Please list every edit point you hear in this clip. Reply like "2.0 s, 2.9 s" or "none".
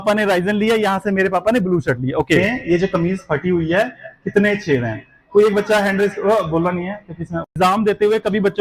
2.4 s, 7.5 s